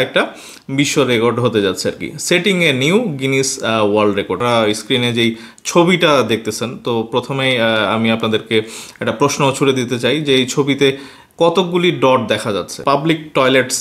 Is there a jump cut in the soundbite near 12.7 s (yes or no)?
yes